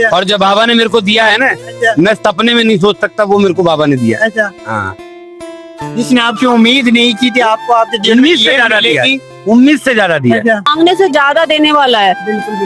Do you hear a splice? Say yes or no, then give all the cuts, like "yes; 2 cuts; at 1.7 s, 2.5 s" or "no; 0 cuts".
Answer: yes; 1 cut; at 10.7 s